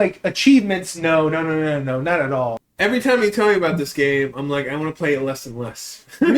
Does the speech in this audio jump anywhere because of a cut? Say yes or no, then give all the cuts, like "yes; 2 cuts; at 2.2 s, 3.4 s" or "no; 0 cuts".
yes; 1 cut; at 2.6 s